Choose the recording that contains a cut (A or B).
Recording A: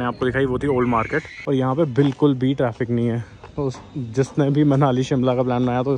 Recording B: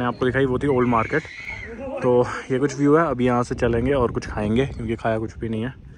A